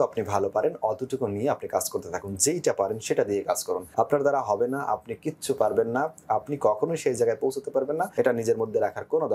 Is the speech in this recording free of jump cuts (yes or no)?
no